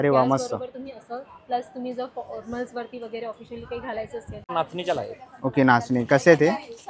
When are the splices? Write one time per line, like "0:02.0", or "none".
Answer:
0:04.5